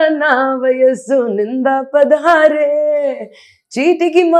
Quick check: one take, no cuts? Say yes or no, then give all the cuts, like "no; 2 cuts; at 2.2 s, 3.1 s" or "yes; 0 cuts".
yes; 0 cuts